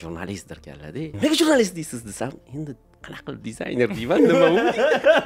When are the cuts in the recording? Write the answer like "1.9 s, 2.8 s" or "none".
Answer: 1.1 s